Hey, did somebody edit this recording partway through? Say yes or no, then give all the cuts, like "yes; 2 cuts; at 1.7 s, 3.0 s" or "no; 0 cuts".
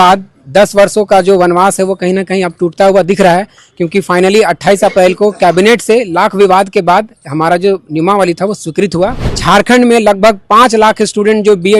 yes; 1 cut; at 9.3 s